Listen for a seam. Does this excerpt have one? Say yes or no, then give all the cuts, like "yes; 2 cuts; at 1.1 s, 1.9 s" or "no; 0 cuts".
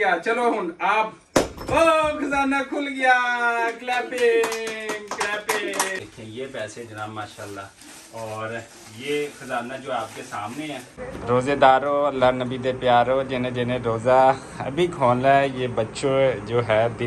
yes; 2 cuts; at 6.0 s, 11.5 s